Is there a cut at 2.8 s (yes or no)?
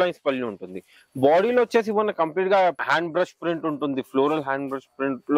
yes